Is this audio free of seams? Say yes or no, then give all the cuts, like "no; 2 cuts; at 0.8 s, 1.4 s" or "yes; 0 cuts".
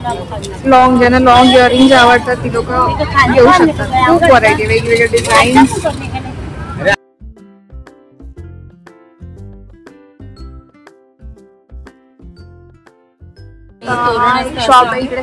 yes; 0 cuts